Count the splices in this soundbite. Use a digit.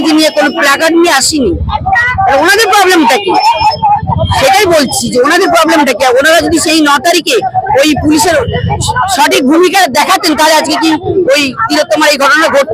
0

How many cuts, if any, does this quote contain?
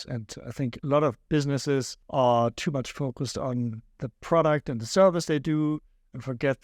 1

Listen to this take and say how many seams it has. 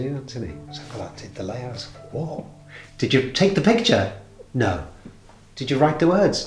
0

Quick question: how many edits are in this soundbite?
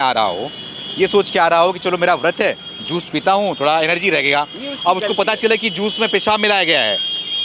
0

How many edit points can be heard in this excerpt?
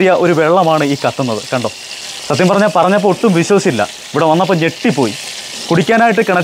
0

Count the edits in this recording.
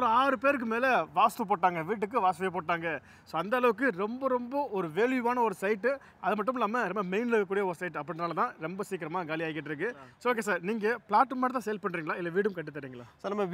1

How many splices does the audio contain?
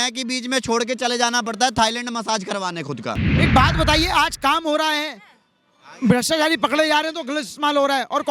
1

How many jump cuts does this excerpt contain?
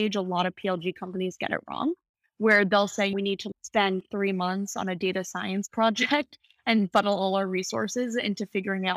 1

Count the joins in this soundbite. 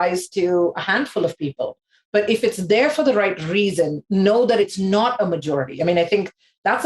1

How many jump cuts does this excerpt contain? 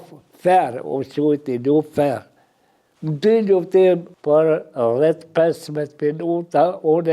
1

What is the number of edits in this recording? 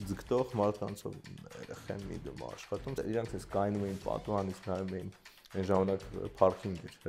2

